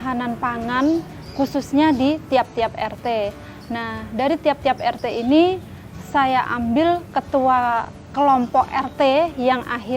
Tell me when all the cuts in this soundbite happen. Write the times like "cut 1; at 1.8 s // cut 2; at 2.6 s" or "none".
none